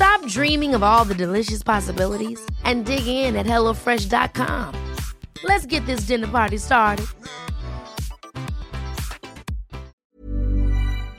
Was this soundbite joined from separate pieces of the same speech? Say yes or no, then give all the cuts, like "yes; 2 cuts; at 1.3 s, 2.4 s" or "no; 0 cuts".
yes; 1 cut; at 10.0 s